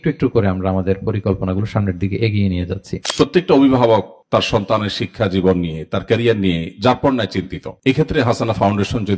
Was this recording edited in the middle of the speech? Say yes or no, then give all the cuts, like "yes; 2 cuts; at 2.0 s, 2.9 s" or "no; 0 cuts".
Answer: yes; 1 cut; at 3.0 s